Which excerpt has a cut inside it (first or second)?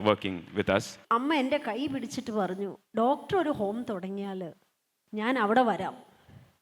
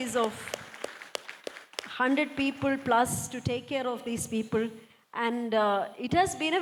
first